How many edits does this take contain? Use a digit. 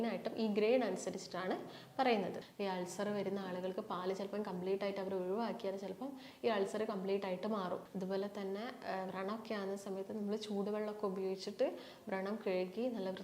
2